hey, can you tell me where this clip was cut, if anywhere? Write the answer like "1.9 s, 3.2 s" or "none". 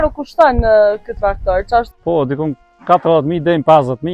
1.9 s